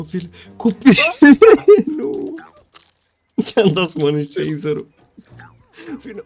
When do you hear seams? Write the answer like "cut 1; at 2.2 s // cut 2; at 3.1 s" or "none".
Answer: none